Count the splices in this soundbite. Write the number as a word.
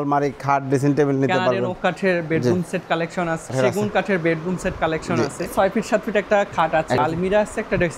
three